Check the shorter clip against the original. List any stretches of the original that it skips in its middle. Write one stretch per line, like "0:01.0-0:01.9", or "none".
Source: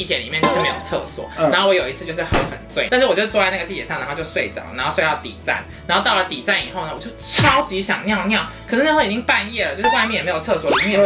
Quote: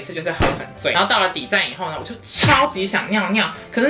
0:02.8-0:05.9